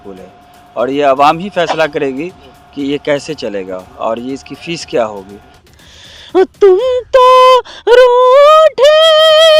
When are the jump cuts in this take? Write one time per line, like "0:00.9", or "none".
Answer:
0:05.6